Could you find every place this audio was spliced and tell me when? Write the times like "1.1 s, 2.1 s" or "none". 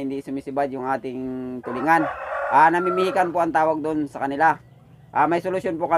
none